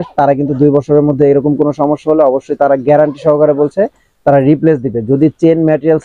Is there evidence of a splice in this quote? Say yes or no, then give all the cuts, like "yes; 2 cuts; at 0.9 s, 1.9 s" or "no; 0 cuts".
no; 0 cuts